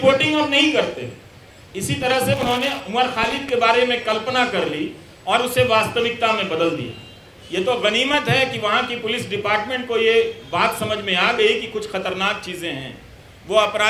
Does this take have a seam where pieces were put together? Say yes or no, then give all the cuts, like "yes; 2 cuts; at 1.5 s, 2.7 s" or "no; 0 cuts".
no; 0 cuts